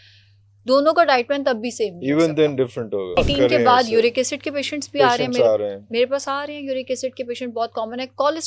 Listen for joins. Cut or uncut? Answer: cut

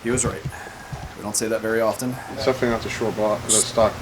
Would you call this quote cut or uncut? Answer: cut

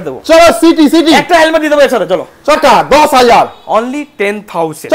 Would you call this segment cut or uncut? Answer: cut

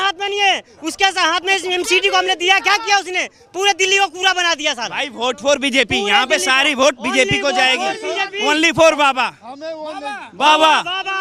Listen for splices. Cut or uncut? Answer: uncut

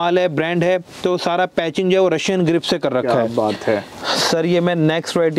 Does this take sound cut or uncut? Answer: cut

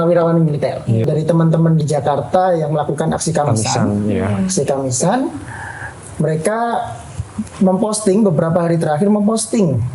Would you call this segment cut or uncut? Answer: cut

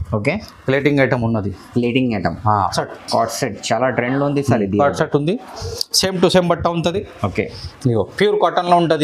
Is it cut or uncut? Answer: cut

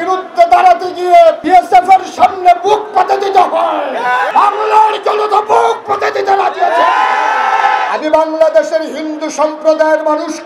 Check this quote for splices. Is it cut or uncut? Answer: cut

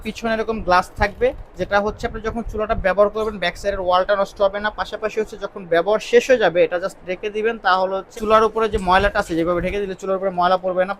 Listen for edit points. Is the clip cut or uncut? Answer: uncut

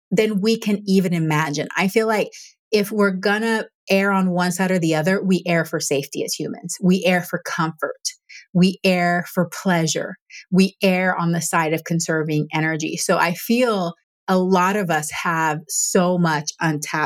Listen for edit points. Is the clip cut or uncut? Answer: cut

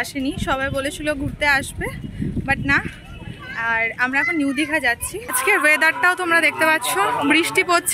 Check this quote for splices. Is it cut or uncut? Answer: cut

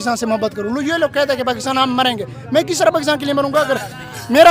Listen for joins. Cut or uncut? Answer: uncut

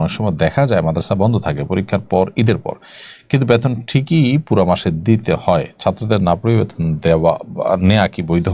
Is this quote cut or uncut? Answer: uncut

